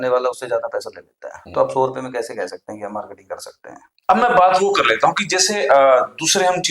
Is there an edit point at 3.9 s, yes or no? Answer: yes